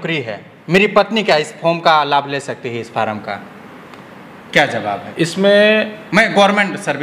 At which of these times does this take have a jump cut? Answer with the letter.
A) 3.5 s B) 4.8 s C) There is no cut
C